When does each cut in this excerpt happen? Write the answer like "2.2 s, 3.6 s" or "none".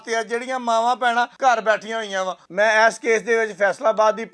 1.3 s, 2.4 s